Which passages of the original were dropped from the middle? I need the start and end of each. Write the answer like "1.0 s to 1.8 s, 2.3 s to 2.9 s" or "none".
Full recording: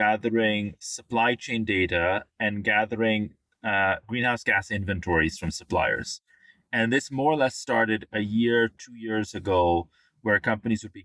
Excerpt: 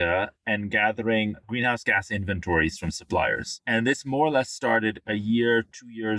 3.4 s to 4.0 s, 6.1 s to 6.6 s